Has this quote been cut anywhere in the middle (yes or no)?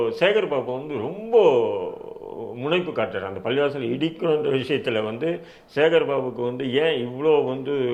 no